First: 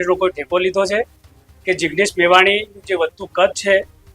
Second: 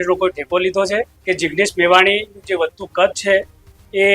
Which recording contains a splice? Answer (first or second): second